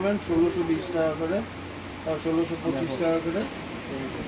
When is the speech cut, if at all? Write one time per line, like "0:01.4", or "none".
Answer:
none